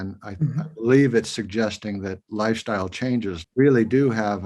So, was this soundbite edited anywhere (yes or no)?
yes